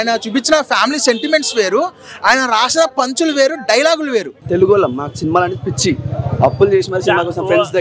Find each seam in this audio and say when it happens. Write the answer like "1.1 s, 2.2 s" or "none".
4.4 s